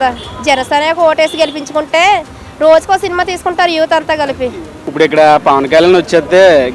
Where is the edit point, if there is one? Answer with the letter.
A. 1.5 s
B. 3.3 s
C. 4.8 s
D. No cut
C